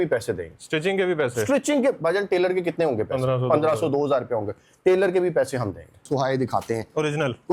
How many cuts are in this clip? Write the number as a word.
one